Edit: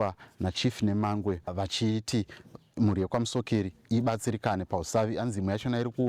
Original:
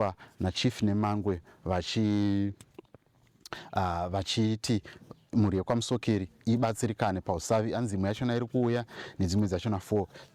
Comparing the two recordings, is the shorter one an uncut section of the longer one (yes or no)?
no